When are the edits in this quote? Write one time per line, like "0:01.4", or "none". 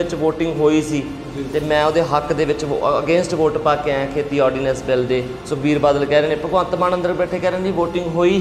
none